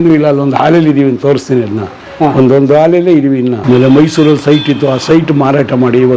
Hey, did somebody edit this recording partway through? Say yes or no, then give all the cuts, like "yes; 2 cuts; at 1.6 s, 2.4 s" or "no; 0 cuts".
yes; 1 cut; at 3.6 s